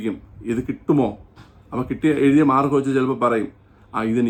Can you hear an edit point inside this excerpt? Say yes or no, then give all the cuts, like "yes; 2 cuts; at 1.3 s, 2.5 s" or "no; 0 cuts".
no; 0 cuts